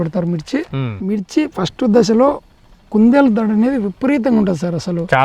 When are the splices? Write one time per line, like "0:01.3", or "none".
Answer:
0:00.9